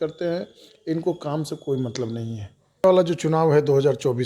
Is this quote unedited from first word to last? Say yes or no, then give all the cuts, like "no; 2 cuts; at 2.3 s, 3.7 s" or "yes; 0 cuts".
no; 1 cut; at 2.8 s